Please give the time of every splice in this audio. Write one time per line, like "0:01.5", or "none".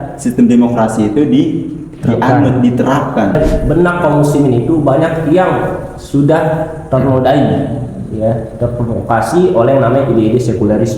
0:03.8